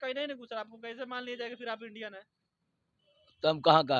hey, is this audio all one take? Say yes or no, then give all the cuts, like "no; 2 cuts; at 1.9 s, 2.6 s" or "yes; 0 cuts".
yes; 0 cuts